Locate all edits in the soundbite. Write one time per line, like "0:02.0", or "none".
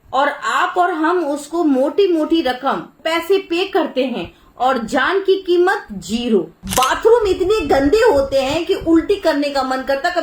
0:02.9
0:06.6